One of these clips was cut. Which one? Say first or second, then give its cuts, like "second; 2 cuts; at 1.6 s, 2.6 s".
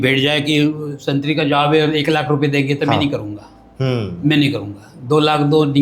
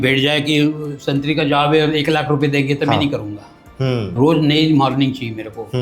second; 1 cut; at 4.1 s